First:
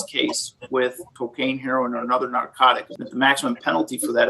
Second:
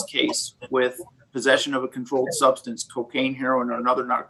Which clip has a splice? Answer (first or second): first